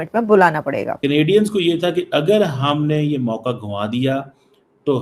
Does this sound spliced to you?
yes; 1 cut; at 0.9 s

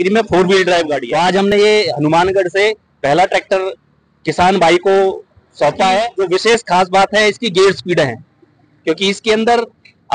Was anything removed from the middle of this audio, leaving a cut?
no; 0 cuts

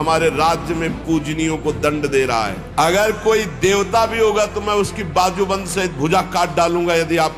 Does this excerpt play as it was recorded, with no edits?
no; 1 cut; at 2.6 s

